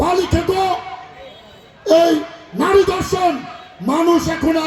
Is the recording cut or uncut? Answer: uncut